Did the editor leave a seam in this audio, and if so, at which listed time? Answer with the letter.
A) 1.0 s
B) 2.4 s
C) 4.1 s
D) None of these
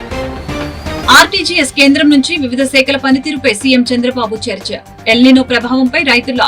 A